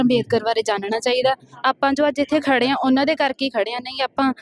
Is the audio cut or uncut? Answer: uncut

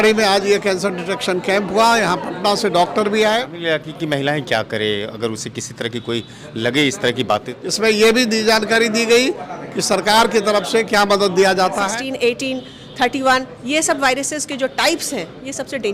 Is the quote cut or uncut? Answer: cut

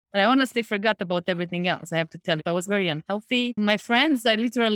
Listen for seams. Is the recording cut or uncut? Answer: cut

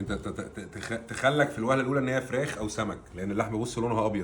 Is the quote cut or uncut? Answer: uncut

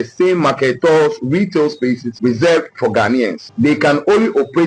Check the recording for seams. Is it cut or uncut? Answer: cut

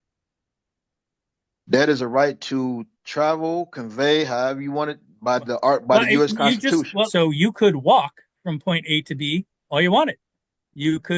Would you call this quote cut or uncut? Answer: cut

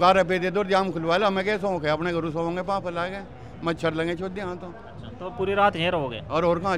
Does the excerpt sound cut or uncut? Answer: uncut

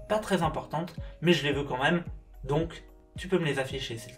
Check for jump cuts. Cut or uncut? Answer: cut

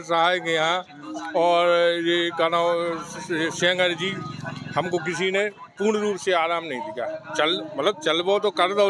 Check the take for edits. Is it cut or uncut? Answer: uncut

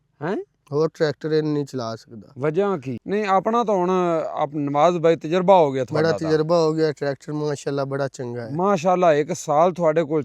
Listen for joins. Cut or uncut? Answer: cut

